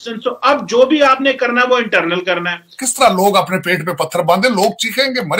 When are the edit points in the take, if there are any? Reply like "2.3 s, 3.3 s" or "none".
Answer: 2.8 s